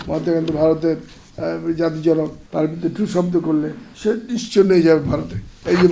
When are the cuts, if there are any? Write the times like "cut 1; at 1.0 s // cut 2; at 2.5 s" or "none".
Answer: cut 1; at 2.4 s // cut 2; at 3.8 s